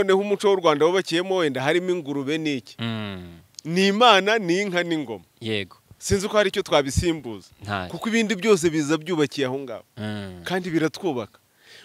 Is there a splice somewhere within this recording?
no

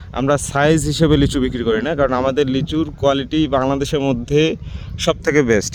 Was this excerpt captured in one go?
yes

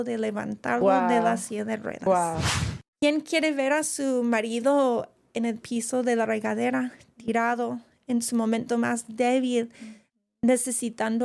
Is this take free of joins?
no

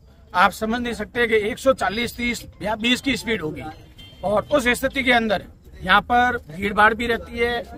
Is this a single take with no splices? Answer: yes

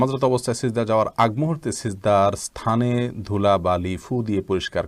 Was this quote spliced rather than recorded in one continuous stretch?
no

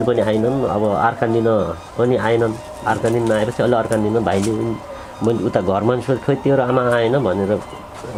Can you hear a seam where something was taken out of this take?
no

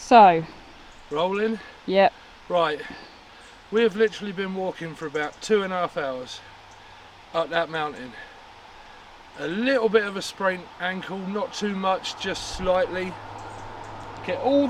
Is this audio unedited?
yes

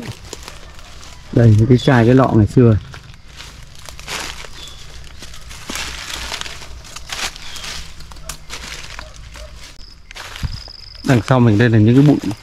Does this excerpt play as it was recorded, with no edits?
no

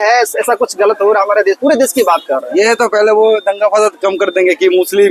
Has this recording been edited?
no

